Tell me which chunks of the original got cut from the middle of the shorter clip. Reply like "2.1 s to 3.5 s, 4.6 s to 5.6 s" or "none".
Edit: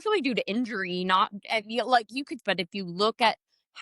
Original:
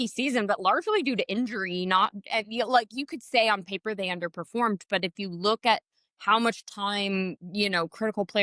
3.2 s to 4.8 s